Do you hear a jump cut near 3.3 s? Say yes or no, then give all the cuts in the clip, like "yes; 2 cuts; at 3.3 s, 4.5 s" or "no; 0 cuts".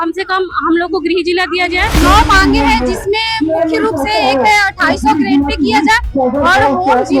no; 1 cut; at 2.0 s